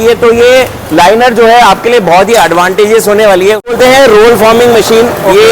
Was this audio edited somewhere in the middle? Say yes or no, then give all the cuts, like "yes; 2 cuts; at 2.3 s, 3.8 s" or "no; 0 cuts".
yes; 1 cut; at 3.7 s